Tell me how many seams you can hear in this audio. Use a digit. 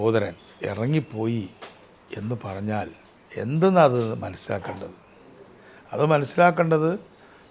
0